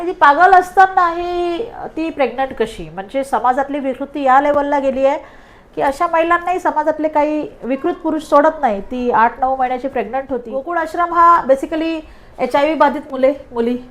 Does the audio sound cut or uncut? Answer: cut